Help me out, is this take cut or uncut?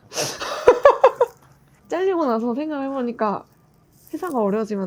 cut